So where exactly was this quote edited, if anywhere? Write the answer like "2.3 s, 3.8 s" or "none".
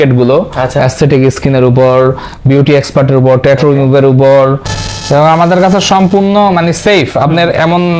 4.7 s